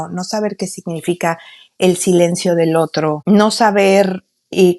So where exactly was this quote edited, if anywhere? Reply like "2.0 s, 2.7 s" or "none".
3.2 s